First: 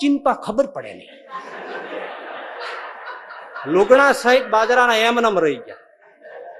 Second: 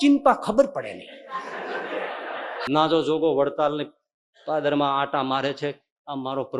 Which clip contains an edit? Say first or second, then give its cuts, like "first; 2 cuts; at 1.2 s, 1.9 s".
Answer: second; 1 cut; at 2.7 s